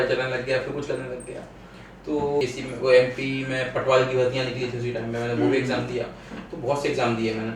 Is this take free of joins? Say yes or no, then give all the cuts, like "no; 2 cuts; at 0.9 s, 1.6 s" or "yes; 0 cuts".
no; 1 cut; at 2.4 s